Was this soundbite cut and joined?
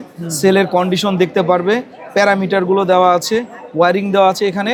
no; 0 cuts

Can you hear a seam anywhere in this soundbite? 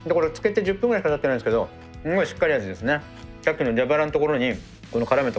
no; 0 cuts

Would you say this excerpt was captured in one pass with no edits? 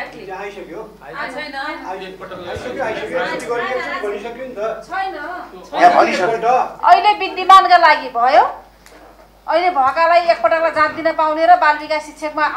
yes; 0 cuts

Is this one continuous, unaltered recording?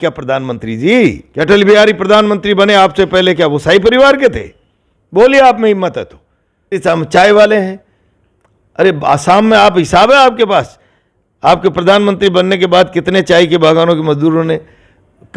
no; 2 cuts; at 1.2 s, 6.8 s

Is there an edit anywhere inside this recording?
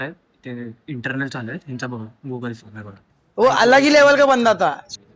no; 0 cuts

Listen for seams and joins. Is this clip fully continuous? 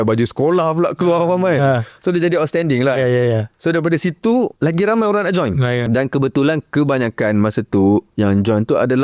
no; 2 cuts; at 4.5 s, 5.8 s

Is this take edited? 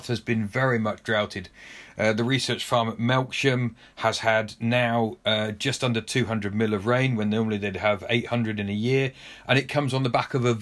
no; 0 cuts

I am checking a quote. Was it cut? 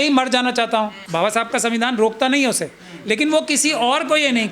yes; 1 cut; at 1.0 s

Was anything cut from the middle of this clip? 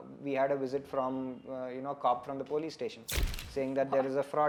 no; 0 cuts

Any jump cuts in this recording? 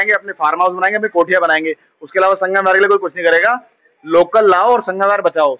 no; 0 cuts

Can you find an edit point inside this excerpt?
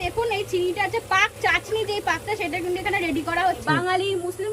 yes; 1 cut; at 3.6 s

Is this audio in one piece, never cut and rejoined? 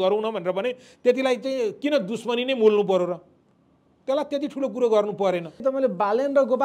no; 1 cut; at 5.6 s

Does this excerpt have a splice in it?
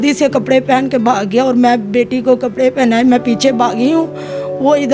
no; 0 cuts

